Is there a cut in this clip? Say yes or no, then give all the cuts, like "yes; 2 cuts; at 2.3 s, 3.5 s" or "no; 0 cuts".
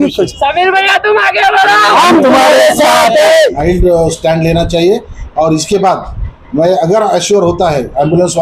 yes; 1 cut; at 3.4 s